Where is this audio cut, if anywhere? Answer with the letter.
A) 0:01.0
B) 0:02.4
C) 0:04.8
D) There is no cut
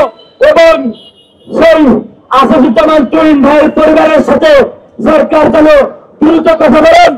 D